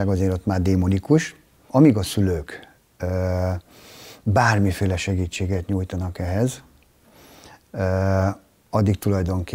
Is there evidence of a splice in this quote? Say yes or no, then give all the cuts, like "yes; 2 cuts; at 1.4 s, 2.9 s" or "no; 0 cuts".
yes; 1 cut; at 1.7 s